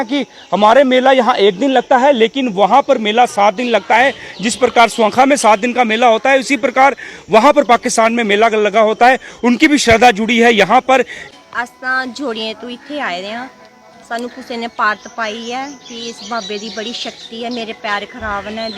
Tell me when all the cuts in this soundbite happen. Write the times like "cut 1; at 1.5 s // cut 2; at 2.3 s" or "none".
cut 1; at 11.2 s